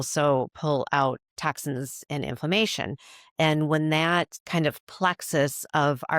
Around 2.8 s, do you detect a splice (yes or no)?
no